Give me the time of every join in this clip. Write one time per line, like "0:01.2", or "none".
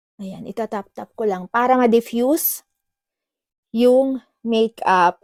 none